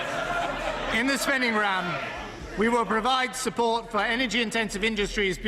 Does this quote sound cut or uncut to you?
cut